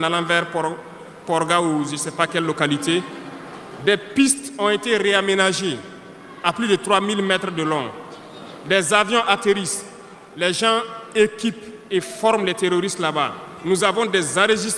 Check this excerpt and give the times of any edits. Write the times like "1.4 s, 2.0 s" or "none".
none